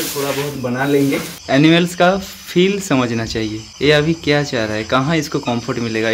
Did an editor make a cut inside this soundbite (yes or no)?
yes